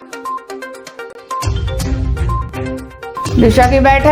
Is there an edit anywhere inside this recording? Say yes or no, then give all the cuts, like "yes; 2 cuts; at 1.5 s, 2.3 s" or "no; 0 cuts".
no; 0 cuts